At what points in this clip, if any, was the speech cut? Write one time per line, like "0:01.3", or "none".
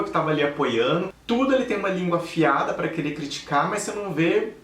0:01.1